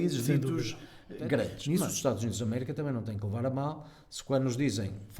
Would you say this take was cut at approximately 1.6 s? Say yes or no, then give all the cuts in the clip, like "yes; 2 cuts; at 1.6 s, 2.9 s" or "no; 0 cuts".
yes; 1 cut; at 1.6 s